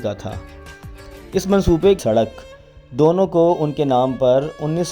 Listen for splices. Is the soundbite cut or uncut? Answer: cut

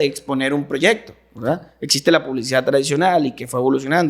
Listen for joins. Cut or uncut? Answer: uncut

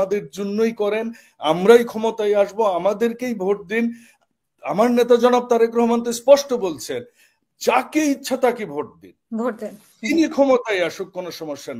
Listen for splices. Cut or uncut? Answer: uncut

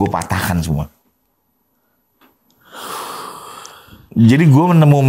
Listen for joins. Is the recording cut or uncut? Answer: uncut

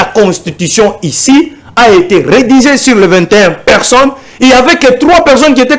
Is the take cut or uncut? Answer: uncut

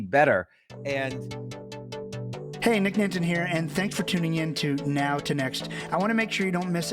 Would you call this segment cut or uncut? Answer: cut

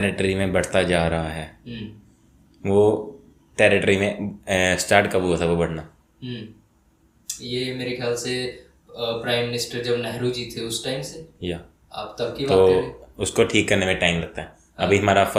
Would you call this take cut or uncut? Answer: uncut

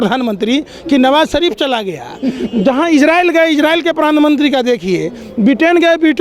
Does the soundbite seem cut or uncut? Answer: uncut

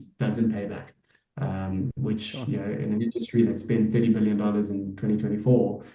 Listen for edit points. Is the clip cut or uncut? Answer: uncut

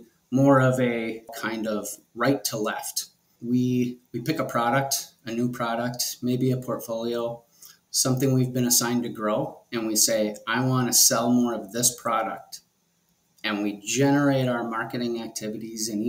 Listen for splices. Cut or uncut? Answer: cut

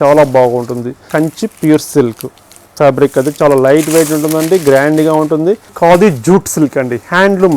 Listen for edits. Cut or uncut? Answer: cut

